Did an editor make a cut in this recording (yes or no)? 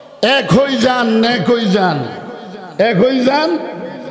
no